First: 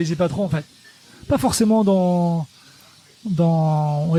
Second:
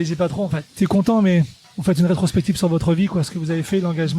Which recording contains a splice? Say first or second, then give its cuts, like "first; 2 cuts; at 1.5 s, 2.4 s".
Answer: second; 2 cuts; at 0.8 s, 1.6 s